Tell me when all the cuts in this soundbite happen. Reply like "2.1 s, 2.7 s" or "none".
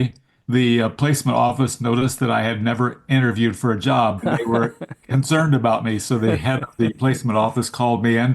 4.2 s